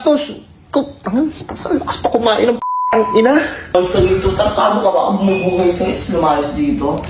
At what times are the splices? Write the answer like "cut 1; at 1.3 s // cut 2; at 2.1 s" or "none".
cut 1; at 3.7 s

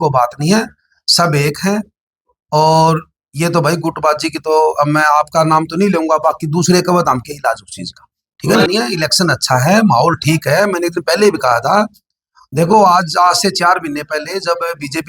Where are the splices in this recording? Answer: cut 1; at 8.7 s

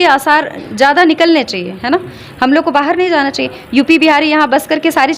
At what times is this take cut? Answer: none

